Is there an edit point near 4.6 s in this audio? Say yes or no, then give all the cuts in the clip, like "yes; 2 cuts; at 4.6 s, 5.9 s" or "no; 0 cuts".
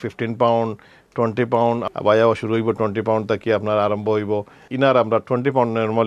yes; 2 cuts; at 1.9 s, 4.6 s